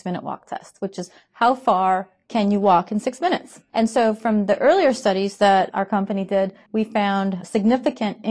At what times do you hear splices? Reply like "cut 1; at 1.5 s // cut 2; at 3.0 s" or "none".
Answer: cut 1; at 3.5 s // cut 2; at 6.6 s

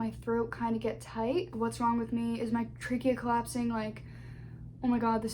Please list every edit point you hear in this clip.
cut 1; at 1.5 s

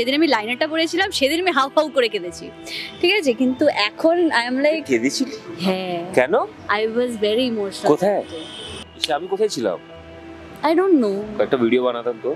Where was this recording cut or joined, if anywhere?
cut 1; at 8.6 s

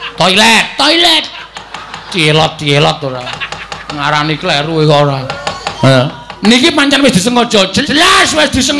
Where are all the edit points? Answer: none

